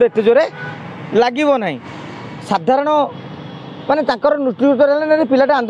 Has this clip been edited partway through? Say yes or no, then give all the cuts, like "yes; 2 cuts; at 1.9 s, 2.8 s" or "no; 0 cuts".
yes; 1 cut; at 2.3 s